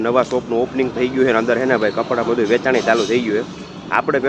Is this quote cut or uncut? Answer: uncut